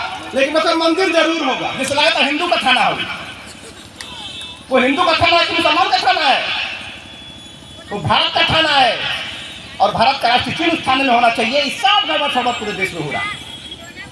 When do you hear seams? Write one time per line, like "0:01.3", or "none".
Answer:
none